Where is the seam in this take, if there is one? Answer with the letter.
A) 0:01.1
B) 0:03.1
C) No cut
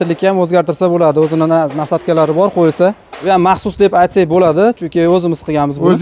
B